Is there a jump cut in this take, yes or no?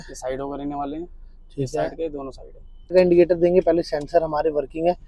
yes